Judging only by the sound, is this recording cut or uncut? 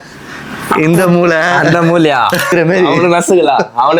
cut